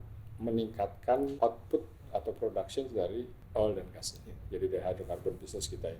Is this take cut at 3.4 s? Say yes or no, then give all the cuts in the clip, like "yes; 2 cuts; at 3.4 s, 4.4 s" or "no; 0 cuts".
yes; 2 cuts; at 1.3 s, 3.4 s